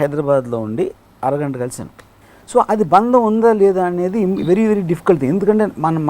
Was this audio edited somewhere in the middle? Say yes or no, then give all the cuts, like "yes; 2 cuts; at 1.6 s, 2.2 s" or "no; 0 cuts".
no; 0 cuts